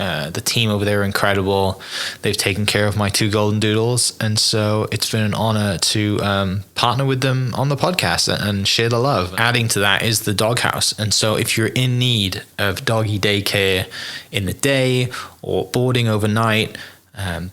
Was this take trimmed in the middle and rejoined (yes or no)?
yes